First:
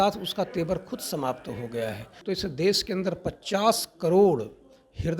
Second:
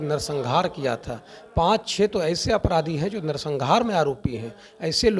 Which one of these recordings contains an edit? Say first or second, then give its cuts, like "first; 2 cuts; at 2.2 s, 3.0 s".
first; 1 cut; at 2.1 s